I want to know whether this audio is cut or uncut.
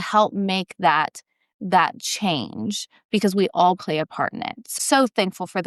cut